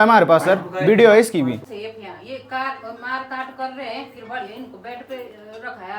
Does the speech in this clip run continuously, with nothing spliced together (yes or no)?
no